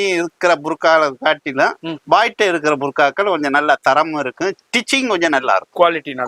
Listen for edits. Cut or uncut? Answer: uncut